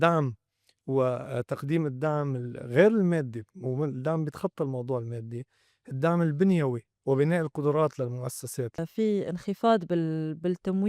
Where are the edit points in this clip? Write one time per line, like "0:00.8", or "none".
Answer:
0:08.8